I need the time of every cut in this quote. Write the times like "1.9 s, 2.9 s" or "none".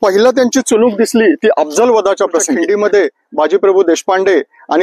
2.6 s